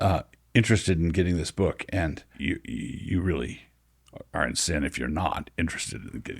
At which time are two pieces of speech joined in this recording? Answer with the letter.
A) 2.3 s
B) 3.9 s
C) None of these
A